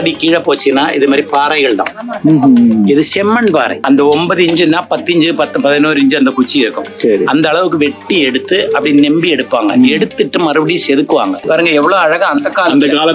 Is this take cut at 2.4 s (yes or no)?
no